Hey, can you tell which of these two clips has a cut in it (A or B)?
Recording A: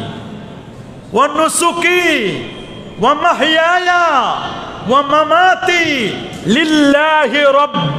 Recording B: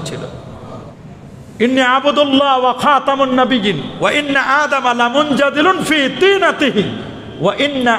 B